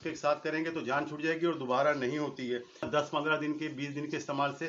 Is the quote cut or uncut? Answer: cut